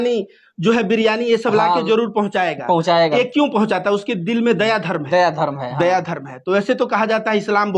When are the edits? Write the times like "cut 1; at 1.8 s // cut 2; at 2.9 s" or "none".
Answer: none